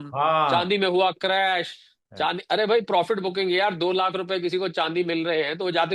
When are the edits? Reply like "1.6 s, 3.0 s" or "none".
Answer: none